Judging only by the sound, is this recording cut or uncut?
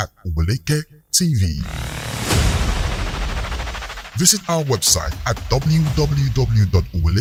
uncut